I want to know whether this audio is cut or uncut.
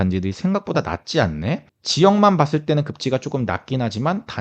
cut